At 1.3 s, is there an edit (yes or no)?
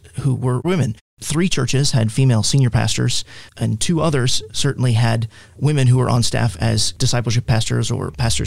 no